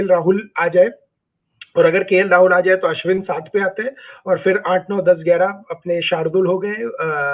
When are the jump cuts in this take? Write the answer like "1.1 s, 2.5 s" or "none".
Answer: none